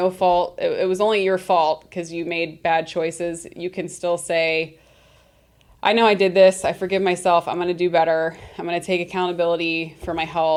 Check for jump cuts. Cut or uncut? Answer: uncut